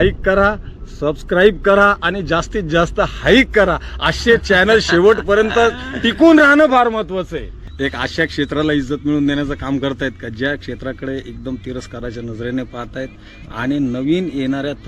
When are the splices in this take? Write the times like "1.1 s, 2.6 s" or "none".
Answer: 7.6 s